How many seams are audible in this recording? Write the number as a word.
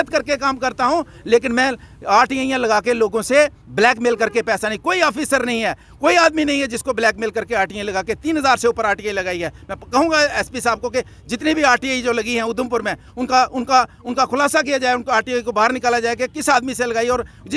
zero